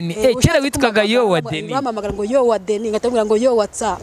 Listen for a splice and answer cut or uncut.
uncut